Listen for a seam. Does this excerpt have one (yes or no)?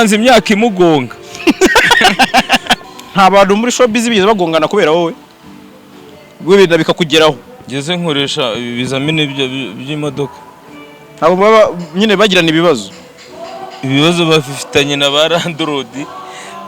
yes